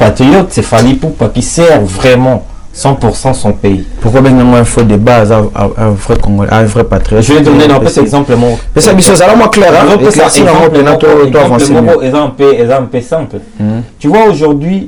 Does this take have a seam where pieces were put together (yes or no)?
no